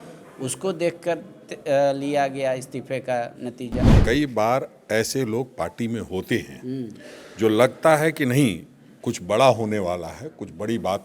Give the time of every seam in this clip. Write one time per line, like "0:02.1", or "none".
0:03.9